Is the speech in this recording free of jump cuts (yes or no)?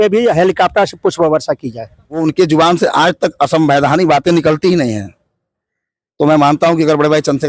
no